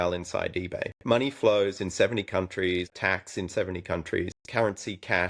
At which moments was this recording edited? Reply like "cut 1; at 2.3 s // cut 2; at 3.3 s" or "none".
cut 1; at 1.0 s // cut 2; at 2.9 s // cut 3; at 4.3 s